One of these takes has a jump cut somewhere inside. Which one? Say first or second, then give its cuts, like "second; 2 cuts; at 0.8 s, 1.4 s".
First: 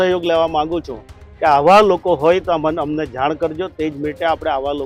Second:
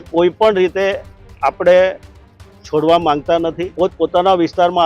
second; 1 cut; at 3.7 s